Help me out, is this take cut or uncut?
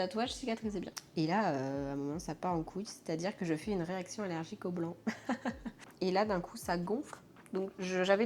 cut